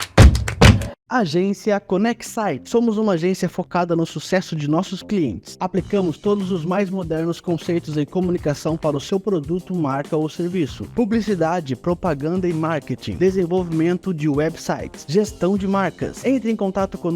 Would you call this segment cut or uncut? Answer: cut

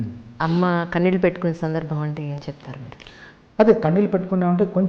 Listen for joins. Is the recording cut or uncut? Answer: uncut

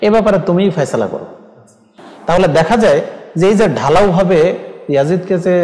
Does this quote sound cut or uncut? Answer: uncut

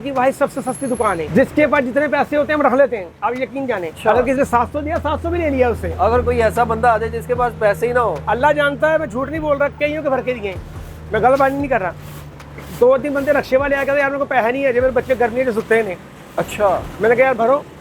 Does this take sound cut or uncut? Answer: cut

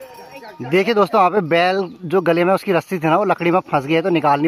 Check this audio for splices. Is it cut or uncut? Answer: uncut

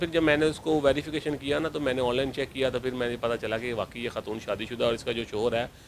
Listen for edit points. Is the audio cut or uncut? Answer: uncut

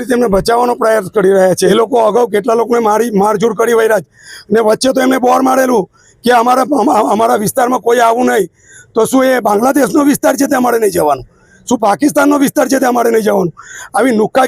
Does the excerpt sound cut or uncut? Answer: cut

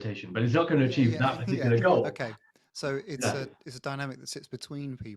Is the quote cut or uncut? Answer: uncut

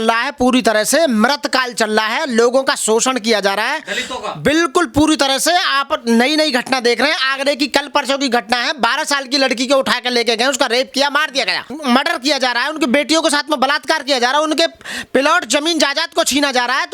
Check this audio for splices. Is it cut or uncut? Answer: cut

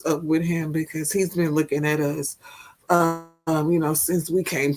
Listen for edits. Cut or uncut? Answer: uncut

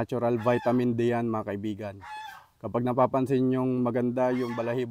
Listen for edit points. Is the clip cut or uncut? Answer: uncut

